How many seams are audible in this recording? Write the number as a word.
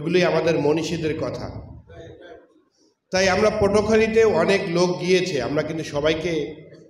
zero